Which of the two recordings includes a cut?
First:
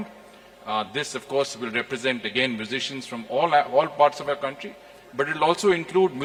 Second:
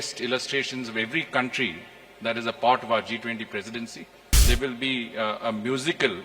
second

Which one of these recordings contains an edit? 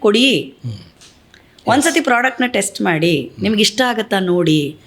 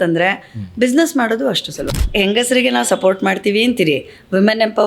second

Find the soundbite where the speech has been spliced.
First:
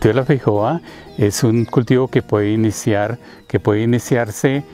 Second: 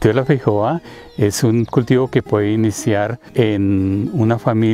second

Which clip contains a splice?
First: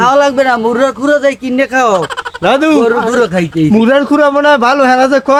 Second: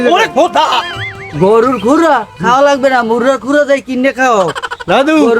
second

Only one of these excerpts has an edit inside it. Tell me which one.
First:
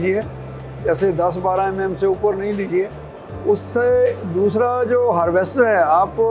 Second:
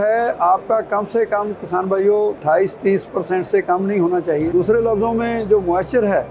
second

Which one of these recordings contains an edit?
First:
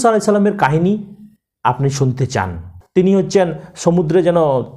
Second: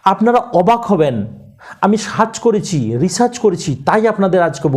first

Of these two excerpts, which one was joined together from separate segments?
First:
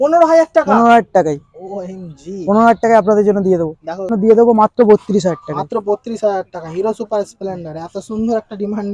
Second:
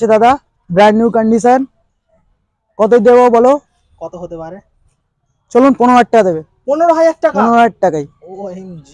first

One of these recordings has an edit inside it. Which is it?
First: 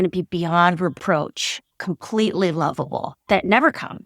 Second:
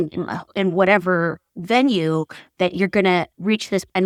first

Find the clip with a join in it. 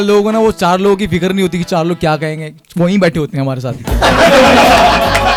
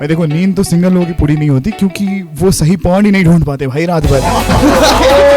second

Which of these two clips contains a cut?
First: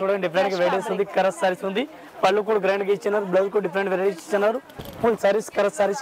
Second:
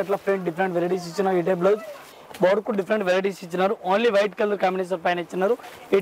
second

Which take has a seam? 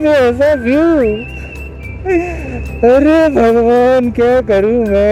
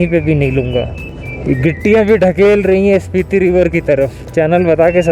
second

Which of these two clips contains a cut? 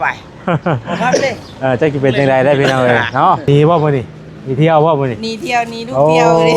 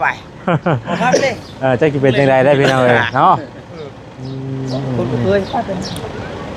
first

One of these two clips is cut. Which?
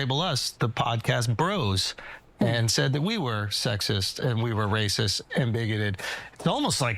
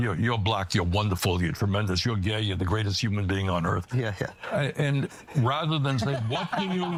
first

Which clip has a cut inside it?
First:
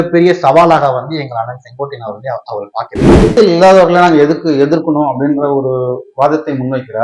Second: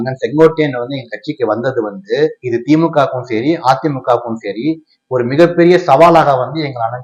first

